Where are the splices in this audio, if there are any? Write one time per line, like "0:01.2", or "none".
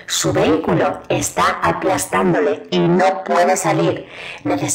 none

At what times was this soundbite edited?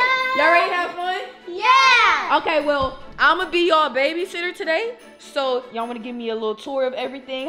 none

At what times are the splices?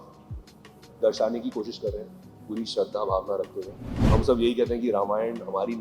0:04.0

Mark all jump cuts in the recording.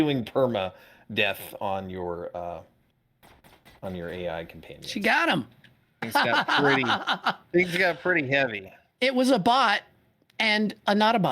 0:06.1

